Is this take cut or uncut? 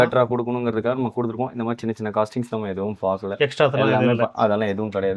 uncut